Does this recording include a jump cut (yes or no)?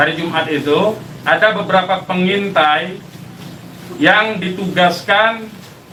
no